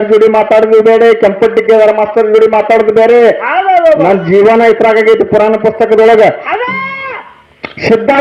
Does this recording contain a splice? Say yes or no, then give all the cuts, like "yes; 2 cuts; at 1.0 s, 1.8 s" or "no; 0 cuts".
yes; 1 cut; at 7.0 s